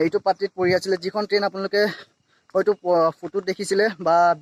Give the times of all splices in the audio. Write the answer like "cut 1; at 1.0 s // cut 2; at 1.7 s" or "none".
none